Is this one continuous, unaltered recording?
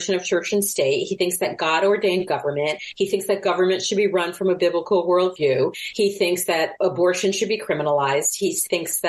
yes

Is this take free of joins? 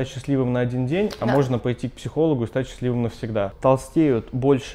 no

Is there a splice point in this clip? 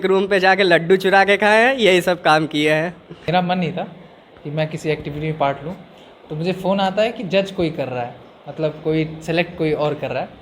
yes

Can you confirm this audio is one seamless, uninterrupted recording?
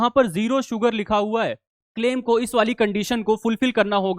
no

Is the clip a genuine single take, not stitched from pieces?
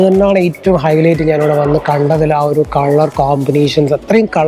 yes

